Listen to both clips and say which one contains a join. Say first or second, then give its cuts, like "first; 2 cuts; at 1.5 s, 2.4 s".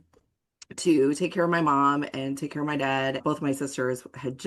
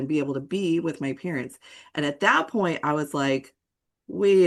first; 1 cut; at 3.2 s